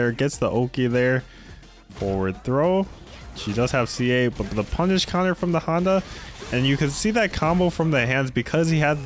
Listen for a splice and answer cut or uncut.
uncut